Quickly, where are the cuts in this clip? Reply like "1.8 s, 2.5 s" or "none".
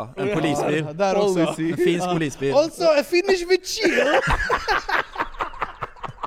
none